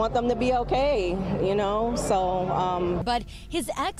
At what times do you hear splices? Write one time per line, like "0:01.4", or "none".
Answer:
0:03.0